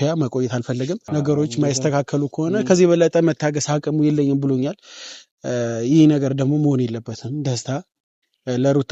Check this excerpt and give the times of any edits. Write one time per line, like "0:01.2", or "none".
0:01.0